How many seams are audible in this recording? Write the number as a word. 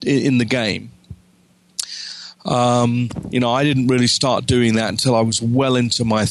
zero